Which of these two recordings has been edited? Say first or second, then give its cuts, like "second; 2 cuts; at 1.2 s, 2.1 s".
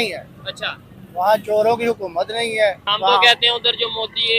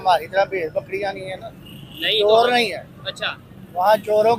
first; 1 cut; at 2.9 s